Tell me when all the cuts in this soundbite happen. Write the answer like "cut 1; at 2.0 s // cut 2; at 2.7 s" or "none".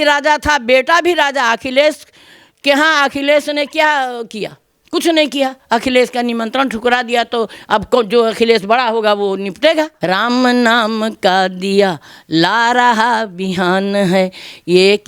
cut 1; at 10.0 s

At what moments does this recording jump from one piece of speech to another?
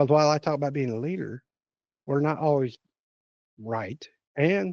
none

